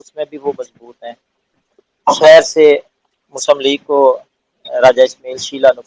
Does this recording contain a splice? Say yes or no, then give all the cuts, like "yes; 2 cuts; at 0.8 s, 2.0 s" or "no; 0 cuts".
no; 0 cuts